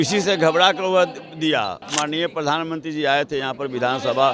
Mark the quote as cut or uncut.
cut